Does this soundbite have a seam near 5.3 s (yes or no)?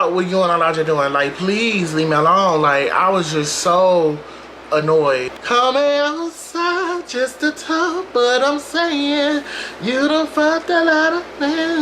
yes